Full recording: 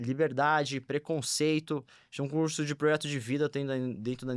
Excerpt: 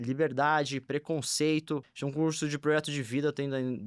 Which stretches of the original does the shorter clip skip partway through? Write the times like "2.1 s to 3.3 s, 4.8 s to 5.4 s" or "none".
2.0 s to 2.1 s